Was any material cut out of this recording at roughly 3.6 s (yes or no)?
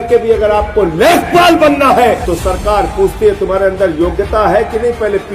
no